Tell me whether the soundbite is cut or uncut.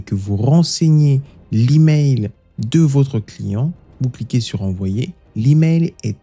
uncut